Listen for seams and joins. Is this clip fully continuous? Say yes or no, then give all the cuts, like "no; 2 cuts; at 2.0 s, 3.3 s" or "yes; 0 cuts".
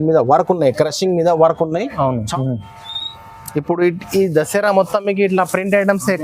no; 1 cut; at 2.2 s